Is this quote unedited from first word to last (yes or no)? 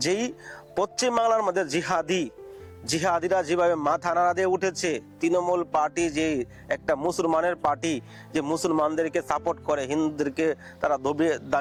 yes